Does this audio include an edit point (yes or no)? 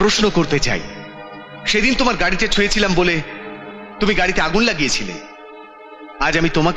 no